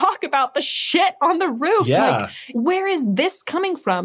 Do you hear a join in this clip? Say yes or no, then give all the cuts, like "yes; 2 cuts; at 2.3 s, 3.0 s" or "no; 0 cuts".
yes; 1 cut; at 2.4 s